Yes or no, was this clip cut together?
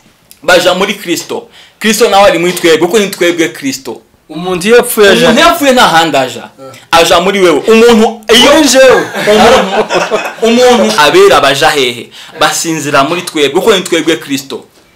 yes